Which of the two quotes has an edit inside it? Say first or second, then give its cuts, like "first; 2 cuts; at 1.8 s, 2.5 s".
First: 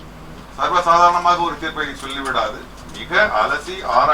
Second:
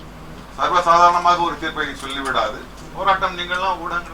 second; 1 cut; at 2.8 s